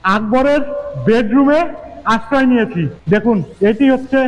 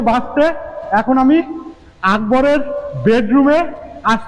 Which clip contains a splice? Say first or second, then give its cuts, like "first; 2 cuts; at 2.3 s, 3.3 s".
first; 1 cut; at 3.2 s